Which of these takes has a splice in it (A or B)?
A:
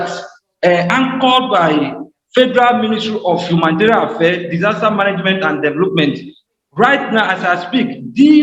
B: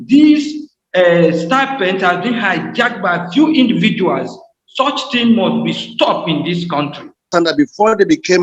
B